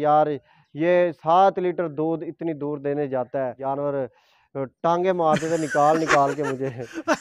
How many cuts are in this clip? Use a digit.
1